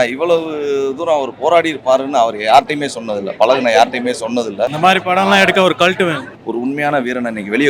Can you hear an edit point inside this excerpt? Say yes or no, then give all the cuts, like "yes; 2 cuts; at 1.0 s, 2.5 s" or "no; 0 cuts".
yes; 2 cuts; at 4.7 s, 6.3 s